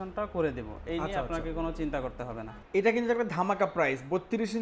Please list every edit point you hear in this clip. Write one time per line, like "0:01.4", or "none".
0:02.5

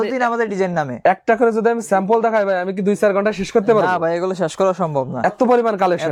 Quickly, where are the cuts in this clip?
none

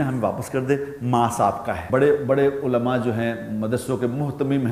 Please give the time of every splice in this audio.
0:01.8

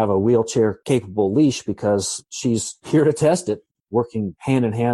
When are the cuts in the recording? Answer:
0:03.7

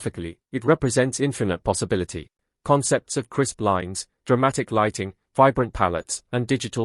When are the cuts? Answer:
0:02.5

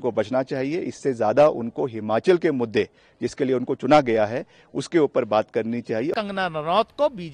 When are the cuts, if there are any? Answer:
0:06.1

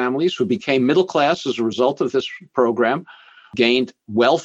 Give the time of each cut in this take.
0:03.5

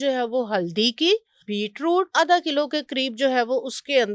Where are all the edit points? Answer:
0:01.6

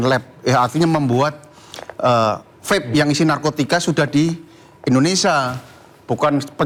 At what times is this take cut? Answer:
none

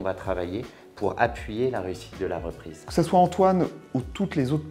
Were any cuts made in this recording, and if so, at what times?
0:02.8

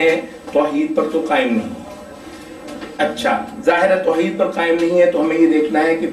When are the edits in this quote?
none

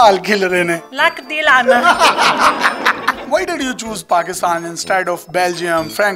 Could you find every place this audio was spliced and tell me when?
0:03.2

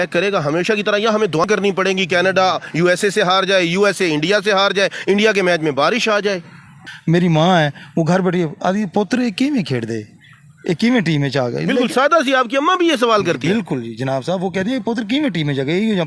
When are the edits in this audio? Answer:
0:01.4
0:06.8

